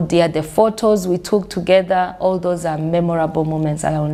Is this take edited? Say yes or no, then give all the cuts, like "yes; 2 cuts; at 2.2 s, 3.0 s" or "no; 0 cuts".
no; 0 cuts